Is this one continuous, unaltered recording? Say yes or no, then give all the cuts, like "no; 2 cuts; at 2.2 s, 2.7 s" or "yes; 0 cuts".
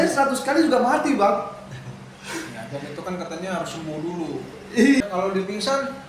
no; 1 cut; at 5.0 s